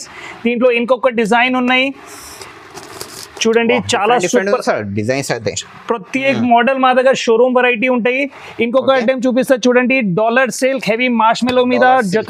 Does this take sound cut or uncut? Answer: uncut